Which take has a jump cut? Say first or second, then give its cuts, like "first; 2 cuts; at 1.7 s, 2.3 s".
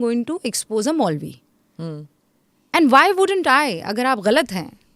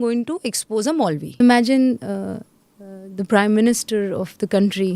second; 1 cut; at 1.4 s